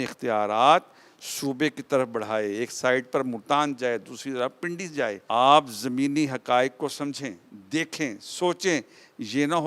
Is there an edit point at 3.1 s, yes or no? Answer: no